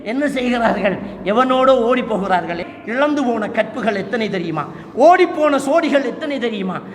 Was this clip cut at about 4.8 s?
no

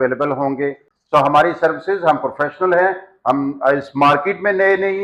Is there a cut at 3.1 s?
no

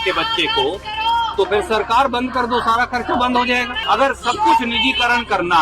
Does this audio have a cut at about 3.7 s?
yes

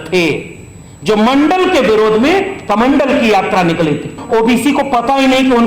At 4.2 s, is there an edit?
yes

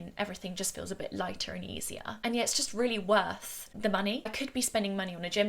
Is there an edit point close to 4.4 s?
yes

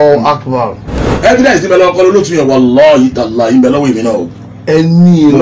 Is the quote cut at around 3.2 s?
no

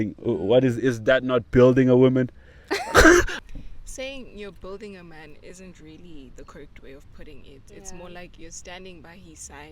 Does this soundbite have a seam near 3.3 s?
yes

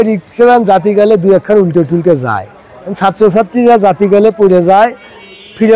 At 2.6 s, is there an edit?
no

